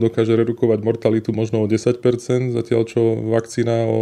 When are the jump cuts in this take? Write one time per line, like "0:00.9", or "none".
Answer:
none

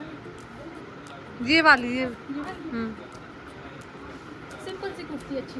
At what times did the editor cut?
none

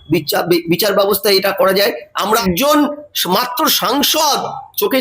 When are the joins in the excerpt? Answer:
0:02.1

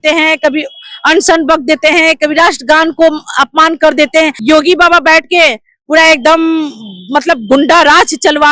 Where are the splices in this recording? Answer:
0:04.4

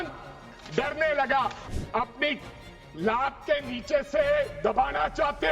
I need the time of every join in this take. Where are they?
0:01.7

